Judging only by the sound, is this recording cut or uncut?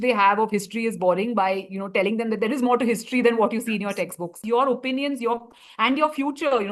cut